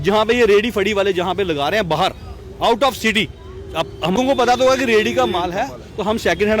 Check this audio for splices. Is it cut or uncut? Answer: cut